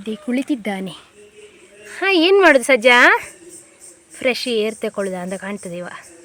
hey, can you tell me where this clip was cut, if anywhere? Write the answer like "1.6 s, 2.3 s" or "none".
none